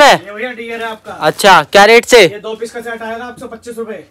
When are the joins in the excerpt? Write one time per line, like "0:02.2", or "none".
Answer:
none